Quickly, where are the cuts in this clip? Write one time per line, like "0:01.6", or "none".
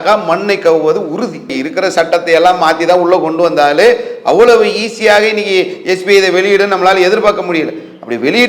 none